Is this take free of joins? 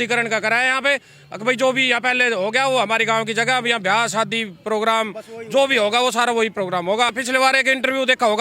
no; 1 cut; at 7.2 s

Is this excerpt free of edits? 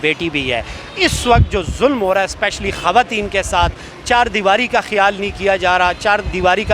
yes; 0 cuts

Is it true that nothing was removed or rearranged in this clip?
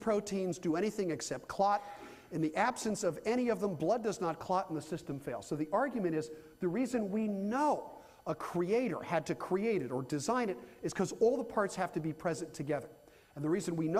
yes; 0 cuts

